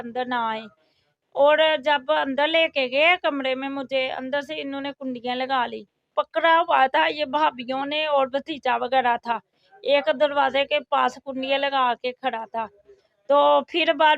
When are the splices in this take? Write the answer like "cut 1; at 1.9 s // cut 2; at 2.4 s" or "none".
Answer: cut 1; at 6.0 s